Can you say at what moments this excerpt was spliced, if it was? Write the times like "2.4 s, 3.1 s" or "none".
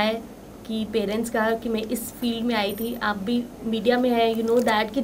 none